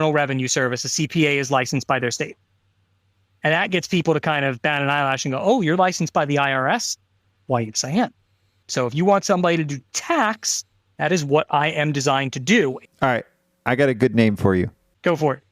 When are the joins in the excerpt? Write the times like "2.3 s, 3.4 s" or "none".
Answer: 12.8 s